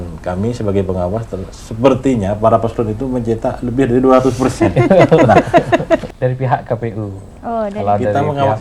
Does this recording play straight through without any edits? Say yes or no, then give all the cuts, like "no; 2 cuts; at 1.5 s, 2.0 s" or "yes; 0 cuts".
no; 1 cut; at 6.1 s